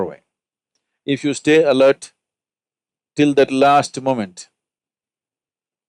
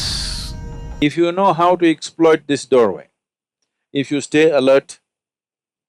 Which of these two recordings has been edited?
second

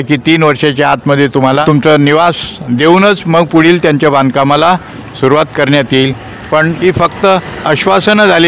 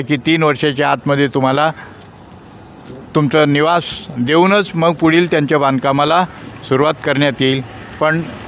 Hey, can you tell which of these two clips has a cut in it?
first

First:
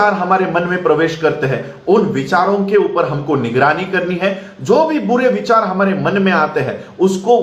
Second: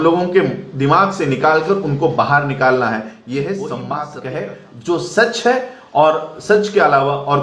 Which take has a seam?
second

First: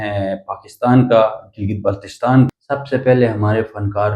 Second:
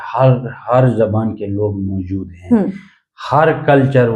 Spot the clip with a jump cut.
first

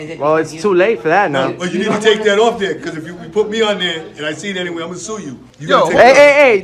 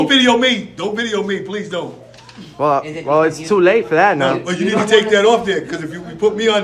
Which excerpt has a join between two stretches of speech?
first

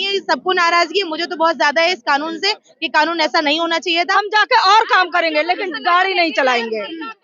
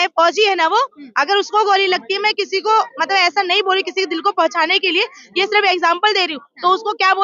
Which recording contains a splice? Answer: first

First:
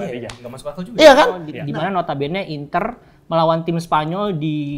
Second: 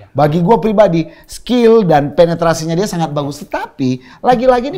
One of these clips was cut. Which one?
first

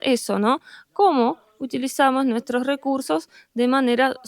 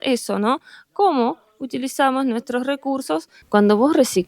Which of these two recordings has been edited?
second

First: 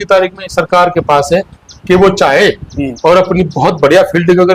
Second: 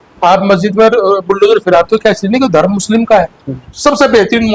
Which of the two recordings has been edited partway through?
second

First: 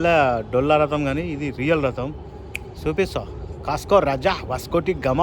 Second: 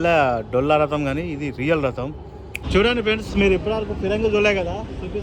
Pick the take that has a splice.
second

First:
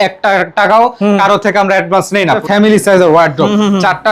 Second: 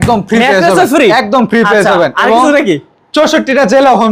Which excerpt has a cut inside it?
first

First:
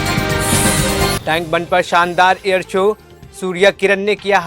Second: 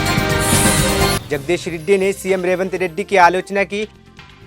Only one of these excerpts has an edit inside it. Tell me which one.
second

